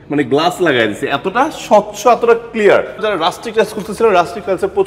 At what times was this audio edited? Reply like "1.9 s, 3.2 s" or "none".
3.0 s